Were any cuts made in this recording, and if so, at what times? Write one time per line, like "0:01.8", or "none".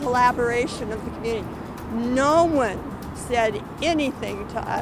none